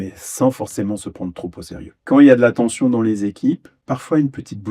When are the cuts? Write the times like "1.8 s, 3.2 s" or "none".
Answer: 2.0 s, 3.7 s